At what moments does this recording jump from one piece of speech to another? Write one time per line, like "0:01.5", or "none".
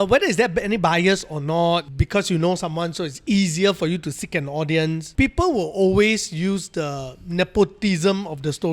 0:01.9
0:05.1

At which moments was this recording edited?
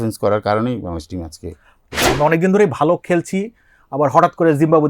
0:02.0

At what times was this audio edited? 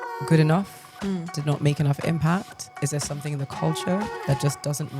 0:01.3
0:02.8

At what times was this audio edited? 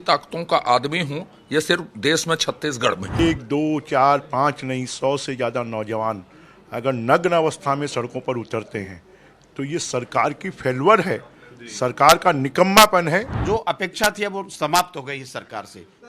0:03.2
0:13.3

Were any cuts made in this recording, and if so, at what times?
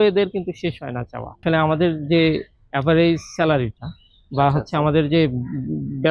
0:01.4

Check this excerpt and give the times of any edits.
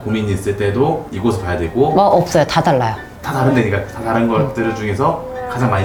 none

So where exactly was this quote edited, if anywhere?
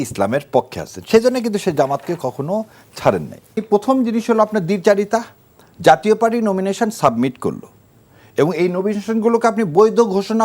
0:03.6

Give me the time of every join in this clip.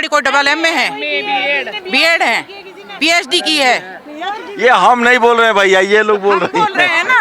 none

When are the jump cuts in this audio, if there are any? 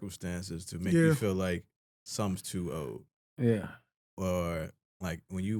none

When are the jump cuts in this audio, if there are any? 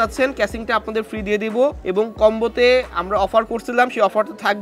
0:01.8

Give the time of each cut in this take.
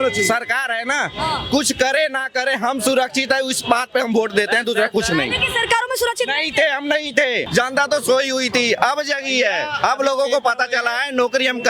0:07.5

